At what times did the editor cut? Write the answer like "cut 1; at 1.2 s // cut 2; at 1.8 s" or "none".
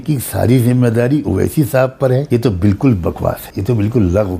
cut 1; at 2.2 s // cut 2; at 3.5 s

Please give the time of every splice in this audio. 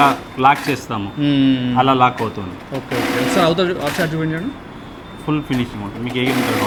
none

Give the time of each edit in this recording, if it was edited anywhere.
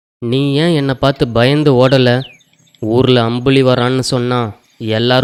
none

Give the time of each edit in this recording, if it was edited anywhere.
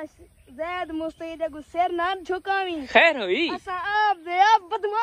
none

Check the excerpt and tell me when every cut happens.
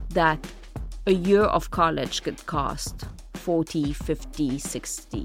none

